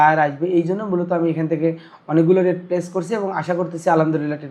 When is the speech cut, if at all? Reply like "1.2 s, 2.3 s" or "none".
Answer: none